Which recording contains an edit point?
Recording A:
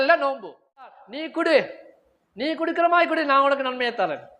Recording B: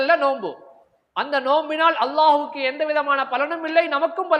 A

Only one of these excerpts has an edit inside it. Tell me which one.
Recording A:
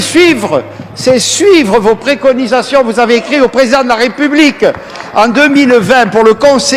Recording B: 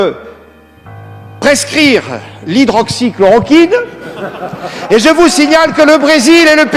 B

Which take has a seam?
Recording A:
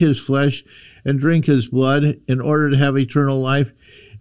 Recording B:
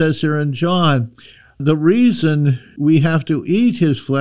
B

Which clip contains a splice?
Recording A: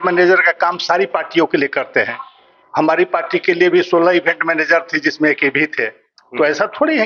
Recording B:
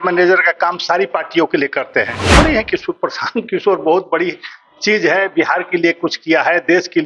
B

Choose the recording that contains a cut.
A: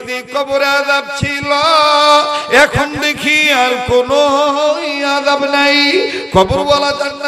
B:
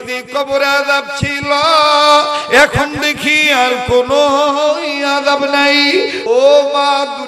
B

